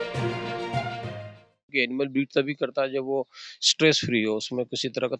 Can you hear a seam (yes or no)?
yes